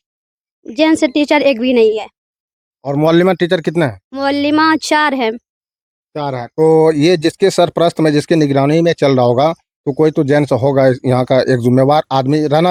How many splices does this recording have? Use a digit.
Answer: 0